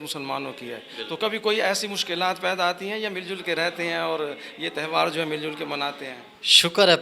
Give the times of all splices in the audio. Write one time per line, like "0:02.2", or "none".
none